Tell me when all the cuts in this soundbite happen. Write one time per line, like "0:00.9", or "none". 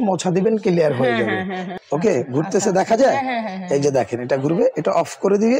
0:01.6